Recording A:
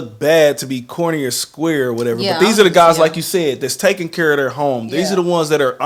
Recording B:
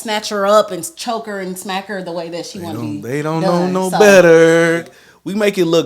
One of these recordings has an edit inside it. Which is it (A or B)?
B